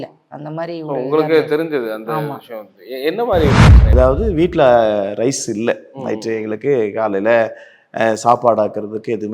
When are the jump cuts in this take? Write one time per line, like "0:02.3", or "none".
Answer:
0:03.9